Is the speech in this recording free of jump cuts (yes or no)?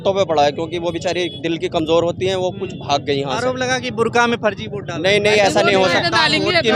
yes